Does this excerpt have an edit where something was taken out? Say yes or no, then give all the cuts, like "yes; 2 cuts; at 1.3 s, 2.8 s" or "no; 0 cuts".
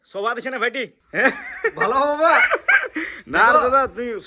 yes; 1 cut; at 1.0 s